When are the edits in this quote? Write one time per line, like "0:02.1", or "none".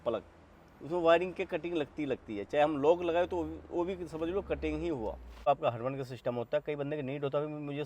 0:05.5